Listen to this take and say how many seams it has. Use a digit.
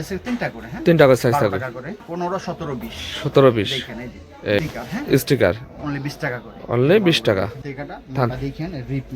3